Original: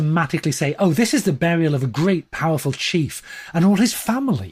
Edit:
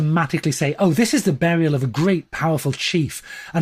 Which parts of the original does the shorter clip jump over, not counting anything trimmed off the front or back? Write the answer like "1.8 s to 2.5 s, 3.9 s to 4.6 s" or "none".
none

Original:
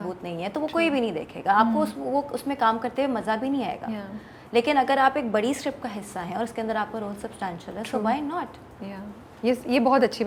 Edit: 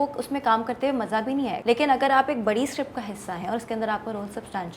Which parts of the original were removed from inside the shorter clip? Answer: 3.7 s to 4.4 s

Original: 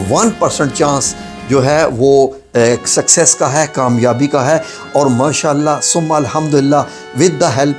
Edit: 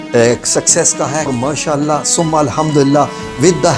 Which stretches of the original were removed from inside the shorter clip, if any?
3.7 s to 5.1 s

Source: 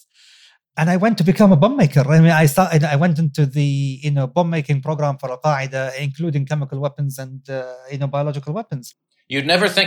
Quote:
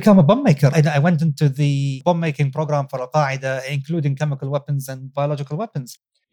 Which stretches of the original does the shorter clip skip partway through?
2.1 s to 2.7 s, 4.0 s to 4.3 s, 7.4 s to 8.1 s

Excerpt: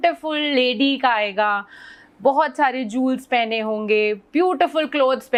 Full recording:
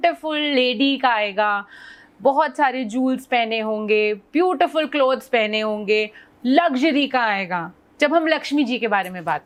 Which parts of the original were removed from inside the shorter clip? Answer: none

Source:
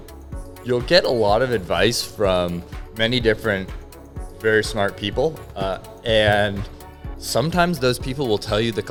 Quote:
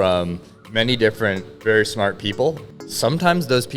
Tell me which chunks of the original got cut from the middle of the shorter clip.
3.7 s to 4.3 s, 5.5 s to 7.0 s

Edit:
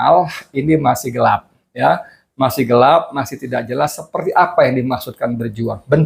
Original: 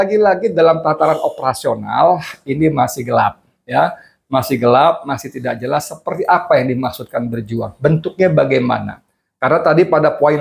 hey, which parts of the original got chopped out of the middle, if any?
none

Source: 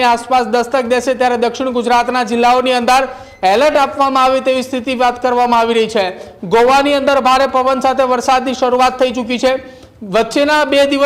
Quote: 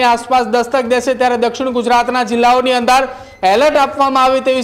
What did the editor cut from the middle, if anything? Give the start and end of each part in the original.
none

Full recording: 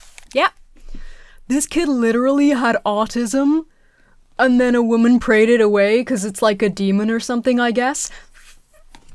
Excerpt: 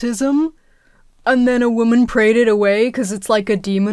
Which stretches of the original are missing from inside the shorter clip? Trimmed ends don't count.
none

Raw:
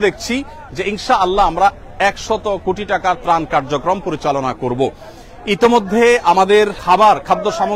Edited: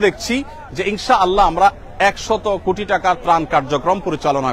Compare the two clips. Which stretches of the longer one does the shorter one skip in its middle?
none

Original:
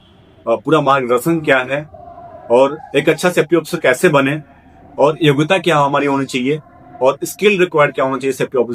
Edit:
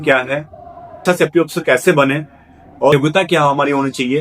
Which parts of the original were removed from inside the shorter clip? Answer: 2.4 s to 3.2 s, 5.1 s to 5.3 s

